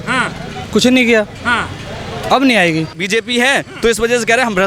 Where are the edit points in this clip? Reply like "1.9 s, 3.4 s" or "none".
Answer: 3.0 s